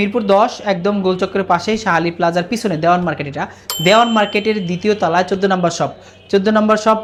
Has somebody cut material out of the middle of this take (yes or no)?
no